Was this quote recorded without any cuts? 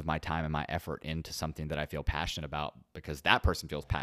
yes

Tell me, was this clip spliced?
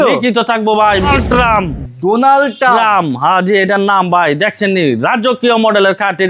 yes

